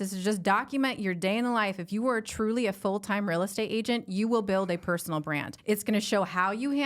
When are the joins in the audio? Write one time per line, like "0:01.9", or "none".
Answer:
0:05.5